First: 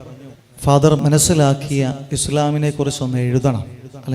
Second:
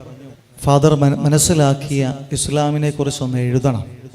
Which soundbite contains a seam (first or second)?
first